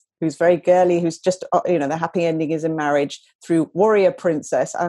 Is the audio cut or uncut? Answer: uncut